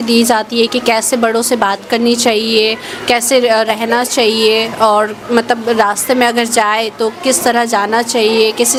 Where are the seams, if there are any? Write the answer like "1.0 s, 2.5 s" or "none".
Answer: none